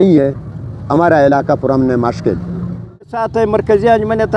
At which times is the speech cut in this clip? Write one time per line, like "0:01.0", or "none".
0:03.2